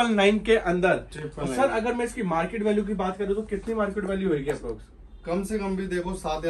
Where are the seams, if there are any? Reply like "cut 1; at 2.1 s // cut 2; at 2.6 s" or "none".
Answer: none

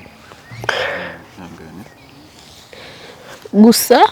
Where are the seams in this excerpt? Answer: none

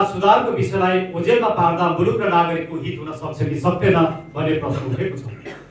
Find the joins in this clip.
none

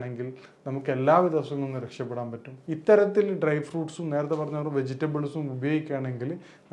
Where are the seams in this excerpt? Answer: cut 1; at 2.5 s

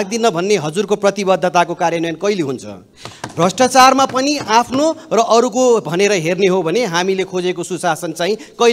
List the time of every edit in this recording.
none

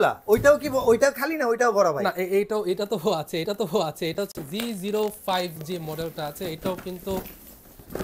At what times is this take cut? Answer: none

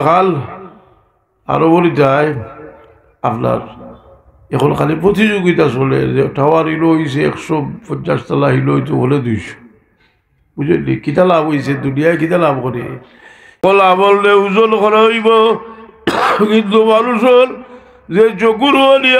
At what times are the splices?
cut 1; at 13.6 s

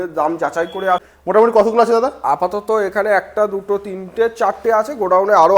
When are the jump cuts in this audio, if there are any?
cut 1; at 1.1 s

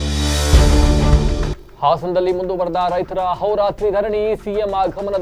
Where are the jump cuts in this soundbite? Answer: none

